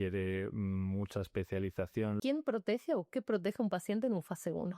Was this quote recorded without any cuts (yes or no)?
no